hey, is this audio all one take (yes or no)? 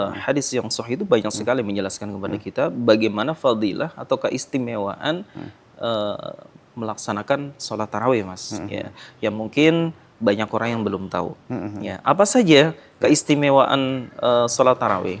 yes